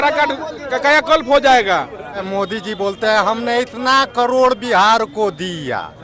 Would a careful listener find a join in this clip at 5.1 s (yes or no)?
no